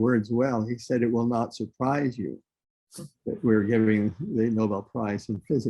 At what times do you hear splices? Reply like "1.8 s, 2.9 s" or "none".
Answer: none